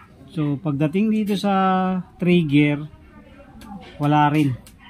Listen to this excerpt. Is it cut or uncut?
uncut